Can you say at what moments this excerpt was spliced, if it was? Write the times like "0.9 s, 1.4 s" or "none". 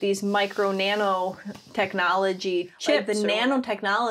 3.0 s